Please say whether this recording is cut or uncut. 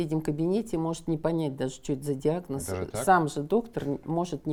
uncut